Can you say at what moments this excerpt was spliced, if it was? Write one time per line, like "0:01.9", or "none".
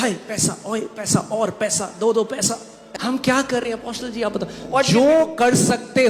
0:02.8